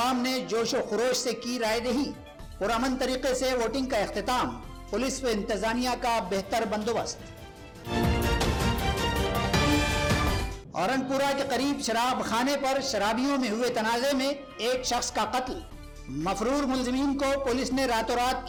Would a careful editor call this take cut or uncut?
uncut